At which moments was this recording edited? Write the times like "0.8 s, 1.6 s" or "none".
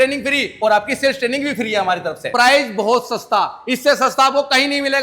2.3 s